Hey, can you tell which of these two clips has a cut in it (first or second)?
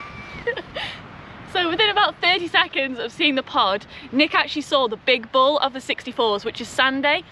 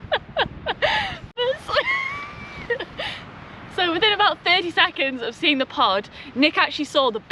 second